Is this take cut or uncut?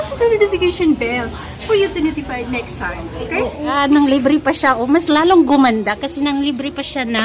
cut